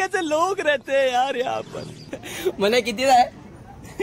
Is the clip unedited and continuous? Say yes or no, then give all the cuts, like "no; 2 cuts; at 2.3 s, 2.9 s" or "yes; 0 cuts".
no; 1 cut; at 2.4 s